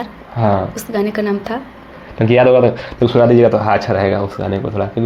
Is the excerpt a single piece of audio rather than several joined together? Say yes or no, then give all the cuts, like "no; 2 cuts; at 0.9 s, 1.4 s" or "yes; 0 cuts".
yes; 0 cuts